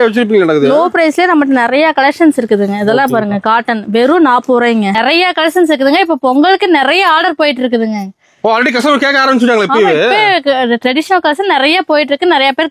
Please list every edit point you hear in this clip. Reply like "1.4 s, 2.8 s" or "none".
4.9 s